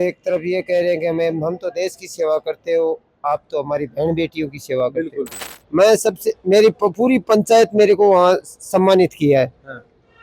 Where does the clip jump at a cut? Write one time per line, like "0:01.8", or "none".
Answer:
0:05.5